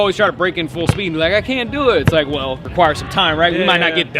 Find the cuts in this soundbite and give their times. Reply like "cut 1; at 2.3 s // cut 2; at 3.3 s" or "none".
cut 1; at 2.6 s